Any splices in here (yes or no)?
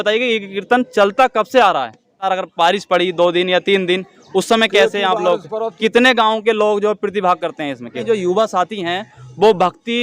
yes